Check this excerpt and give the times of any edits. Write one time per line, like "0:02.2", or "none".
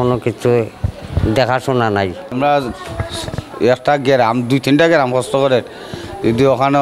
0:02.3